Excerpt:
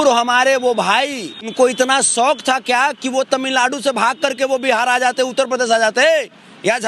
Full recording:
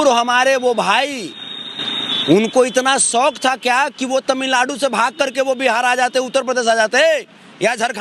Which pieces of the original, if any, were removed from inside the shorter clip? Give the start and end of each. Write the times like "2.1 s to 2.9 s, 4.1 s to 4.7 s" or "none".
1.5 s to 2.5 s

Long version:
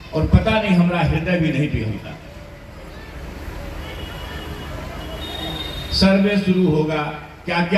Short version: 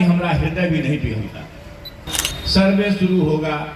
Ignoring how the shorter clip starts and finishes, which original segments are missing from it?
2.8 s to 5.6 s

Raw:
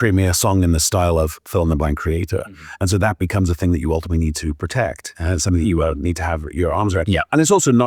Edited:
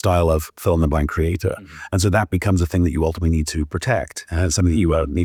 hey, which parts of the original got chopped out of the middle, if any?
none

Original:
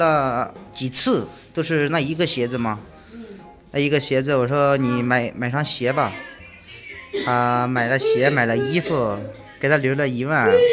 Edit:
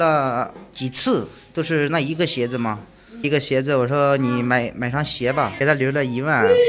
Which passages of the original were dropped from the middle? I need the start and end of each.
3.2 s to 3.8 s, 6.1 s to 9.6 s

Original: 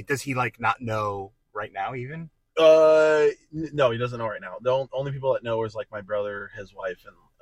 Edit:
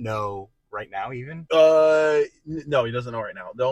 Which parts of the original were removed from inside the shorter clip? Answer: 2.2 s to 2.4 s

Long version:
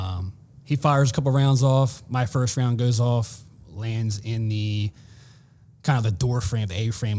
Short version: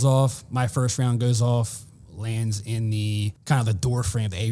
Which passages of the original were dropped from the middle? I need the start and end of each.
4.9 s to 5.7 s

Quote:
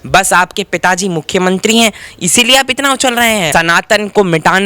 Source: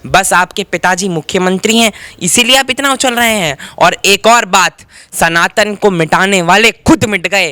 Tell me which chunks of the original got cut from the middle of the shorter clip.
3.5 s to 5.1 s

